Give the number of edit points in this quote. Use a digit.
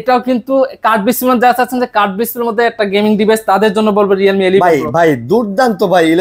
0